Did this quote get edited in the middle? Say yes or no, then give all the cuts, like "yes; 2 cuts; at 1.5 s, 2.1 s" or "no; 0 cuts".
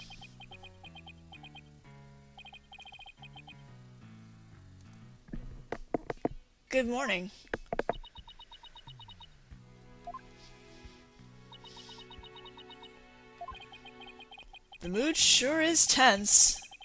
yes; 1 cut; at 15.7 s